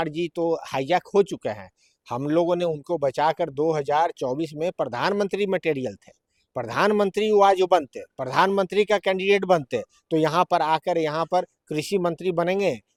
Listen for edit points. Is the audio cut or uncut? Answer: uncut